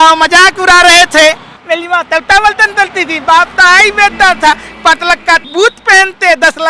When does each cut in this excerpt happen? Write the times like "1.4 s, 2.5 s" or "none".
1.5 s, 5.5 s

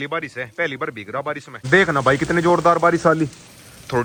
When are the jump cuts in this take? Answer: none

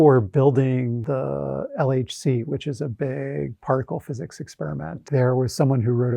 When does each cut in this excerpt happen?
1.0 s, 5.0 s

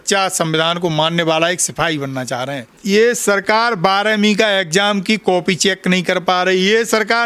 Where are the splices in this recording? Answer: 2.8 s

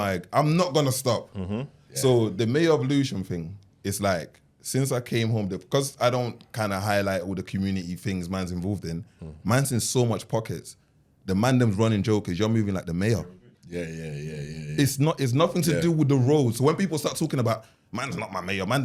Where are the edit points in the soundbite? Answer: none

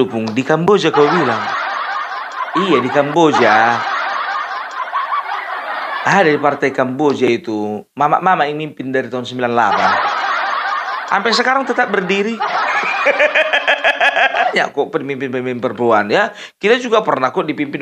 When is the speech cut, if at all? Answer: 14.5 s

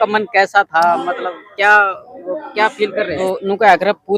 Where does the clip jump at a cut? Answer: 3.2 s

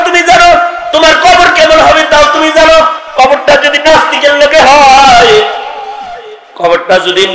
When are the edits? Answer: 3.0 s

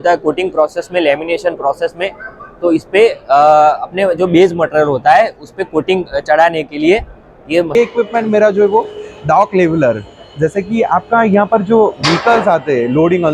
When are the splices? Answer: 7.8 s

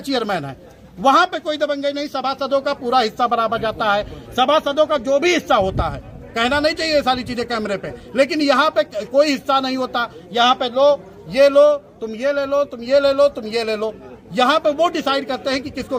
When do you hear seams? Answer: none

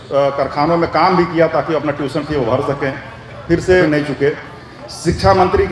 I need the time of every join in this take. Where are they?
3.8 s

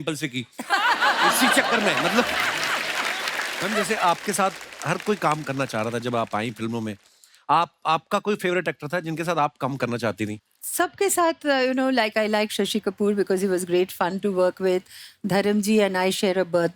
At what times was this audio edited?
3.6 s

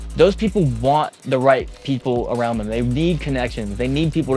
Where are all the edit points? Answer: none

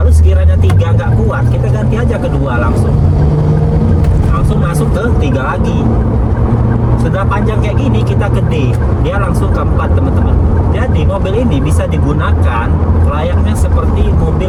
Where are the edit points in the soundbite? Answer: none

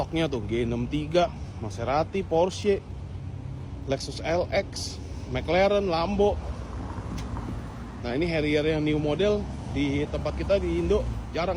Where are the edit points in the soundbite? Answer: none

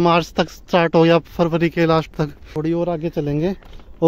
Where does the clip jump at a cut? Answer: 2.4 s

